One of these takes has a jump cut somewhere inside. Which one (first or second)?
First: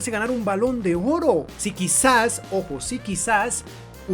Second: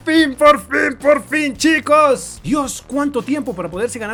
first